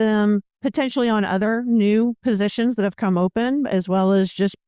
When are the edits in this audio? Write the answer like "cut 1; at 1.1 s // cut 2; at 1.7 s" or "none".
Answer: none